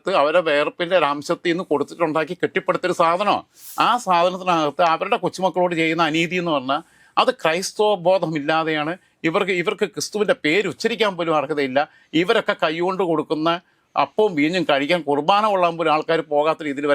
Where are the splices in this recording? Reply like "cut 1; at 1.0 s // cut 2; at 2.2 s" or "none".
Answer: cut 1; at 3.6 s